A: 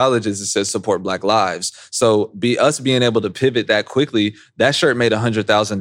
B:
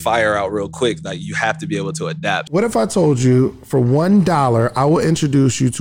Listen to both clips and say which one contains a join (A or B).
B